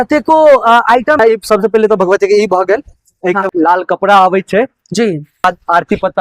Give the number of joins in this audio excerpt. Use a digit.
3